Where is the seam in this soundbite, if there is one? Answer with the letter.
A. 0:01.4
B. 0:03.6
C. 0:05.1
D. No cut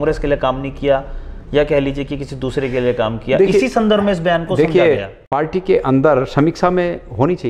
C